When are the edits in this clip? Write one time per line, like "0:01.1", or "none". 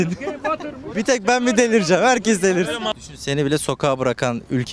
0:02.9